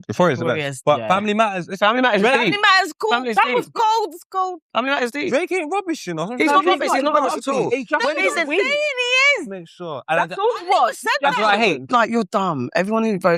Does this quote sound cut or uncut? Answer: cut